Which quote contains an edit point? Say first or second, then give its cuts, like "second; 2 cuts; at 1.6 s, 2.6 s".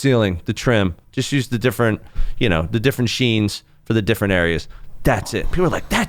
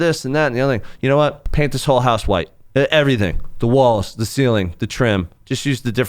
second; 1 cut; at 1.4 s